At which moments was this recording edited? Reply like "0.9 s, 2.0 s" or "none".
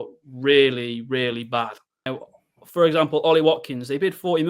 2.1 s